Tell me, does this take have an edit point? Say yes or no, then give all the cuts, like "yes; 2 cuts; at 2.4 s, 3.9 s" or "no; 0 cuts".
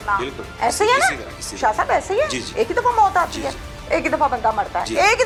no; 0 cuts